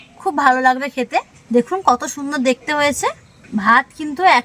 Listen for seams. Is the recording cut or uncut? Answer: cut